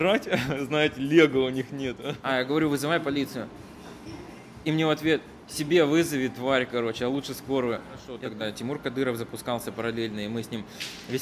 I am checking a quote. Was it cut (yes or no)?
yes